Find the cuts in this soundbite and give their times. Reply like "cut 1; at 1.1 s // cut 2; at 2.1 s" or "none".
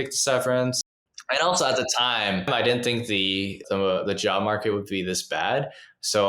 cut 1; at 1.2 s // cut 2; at 2.5 s